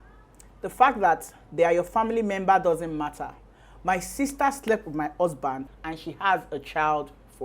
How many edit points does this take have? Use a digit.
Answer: 1